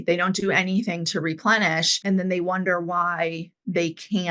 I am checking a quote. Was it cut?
yes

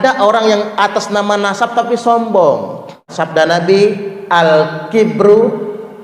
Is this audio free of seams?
no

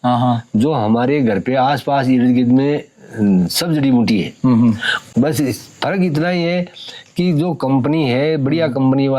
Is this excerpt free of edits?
yes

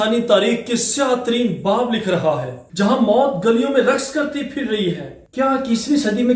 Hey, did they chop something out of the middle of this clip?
yes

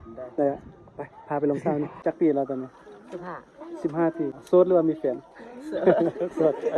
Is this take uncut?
no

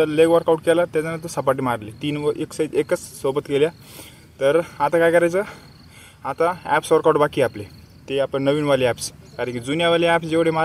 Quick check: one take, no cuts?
yes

